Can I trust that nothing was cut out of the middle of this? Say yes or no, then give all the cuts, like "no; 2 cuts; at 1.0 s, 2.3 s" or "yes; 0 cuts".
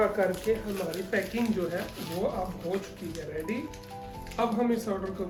yes; 0 cuts